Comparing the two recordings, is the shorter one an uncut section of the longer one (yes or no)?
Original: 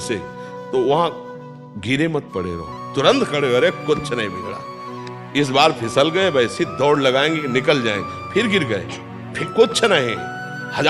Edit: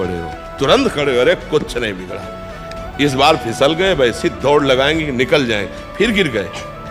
yes